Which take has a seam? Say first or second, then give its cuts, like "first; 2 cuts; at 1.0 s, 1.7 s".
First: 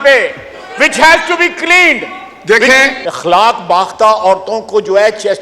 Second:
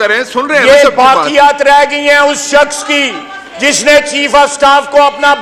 first; 1 cut; at 3.0 s